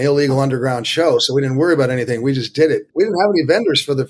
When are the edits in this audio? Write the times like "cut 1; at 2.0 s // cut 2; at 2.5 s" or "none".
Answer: cut 1; at 2.9 s